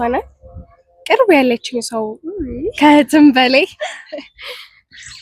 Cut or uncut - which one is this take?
uncut